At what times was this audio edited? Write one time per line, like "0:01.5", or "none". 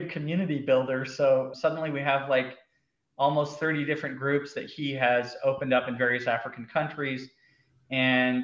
none